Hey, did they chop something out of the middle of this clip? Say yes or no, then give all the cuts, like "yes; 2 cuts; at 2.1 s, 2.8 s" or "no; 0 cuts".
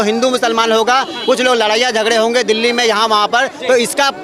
no; 0 cuts